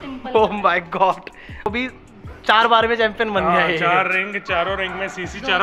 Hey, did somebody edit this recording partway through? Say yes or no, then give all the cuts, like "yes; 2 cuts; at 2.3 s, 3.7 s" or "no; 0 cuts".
yes; 1 cut; at 1.7 s